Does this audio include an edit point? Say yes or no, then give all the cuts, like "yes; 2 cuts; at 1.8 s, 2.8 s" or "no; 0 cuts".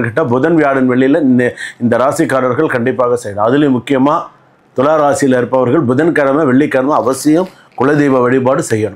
no; 0 cuts